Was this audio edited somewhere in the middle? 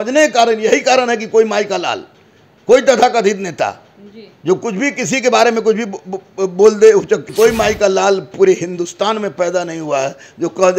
yes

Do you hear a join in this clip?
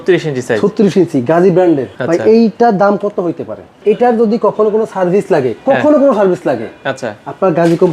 yes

